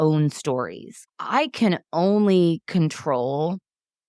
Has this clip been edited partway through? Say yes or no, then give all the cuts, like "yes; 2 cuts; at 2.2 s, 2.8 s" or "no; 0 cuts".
yes; 1 cut; at 1.0 s